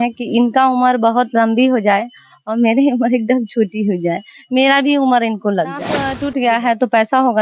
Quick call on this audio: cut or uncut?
cut